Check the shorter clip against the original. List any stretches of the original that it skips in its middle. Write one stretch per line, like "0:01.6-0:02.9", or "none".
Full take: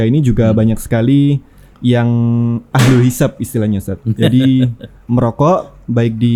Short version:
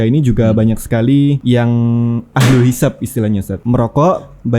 0:01.4-0:01.8
0:03.9-0:05.0